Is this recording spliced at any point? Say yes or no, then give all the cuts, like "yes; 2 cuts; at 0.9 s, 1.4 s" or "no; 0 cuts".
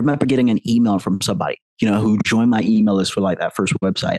no; 0 cuts